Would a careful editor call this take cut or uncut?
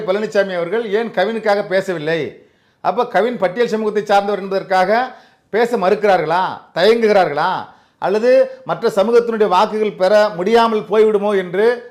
uncut